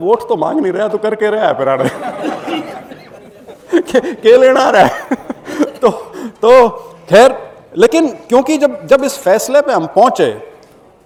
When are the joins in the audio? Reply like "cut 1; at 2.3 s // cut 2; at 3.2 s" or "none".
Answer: none